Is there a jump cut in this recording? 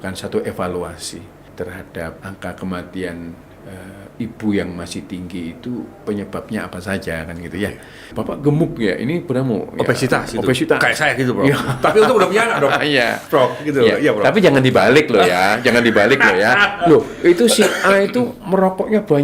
yes; 4 cuts; at 1.4 s, 2.2 s, 8.1 s, 16.7 s

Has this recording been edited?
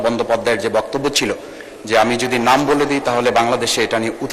no; 0 cuts

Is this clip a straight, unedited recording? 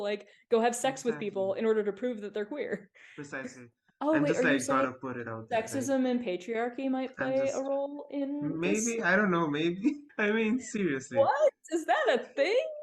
no; 2 cuts; at 3.7 s, 10.1 s

